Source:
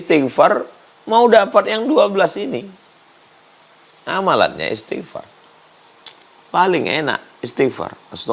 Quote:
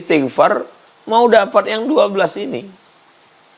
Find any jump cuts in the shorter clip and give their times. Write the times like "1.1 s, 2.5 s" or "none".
none